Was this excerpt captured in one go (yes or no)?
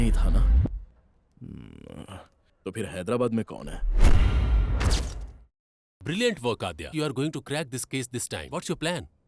no